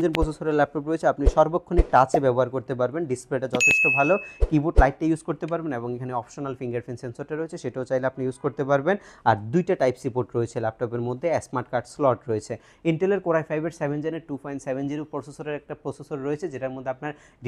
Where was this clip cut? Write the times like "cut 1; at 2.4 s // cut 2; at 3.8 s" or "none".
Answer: none